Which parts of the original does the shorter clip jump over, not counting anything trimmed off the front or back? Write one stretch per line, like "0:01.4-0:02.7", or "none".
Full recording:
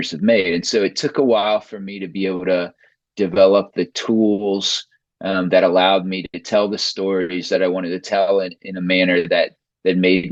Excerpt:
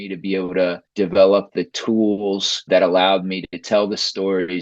0:02.8-0:03.1
0:04.8-0:05.4